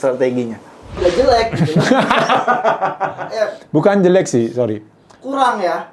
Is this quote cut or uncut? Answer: cut